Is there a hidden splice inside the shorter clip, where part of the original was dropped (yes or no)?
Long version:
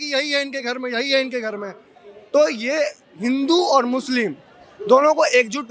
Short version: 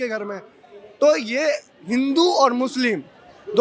no